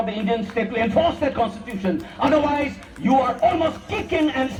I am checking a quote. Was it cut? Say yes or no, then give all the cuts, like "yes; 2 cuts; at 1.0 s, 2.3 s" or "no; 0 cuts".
no; 0 cuts